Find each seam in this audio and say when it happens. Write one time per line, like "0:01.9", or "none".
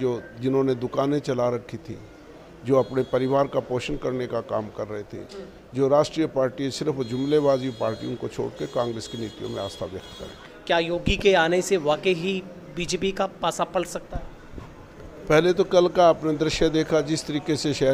0:10.5